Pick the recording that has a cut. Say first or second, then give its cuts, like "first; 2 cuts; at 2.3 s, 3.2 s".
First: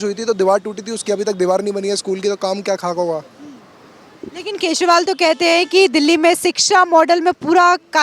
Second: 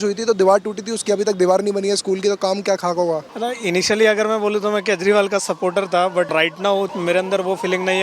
second; 2 cuts; at 3.3 s, 6.7 s